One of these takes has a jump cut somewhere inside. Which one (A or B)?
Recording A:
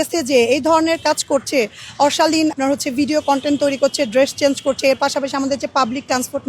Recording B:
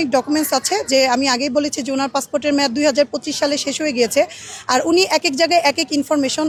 A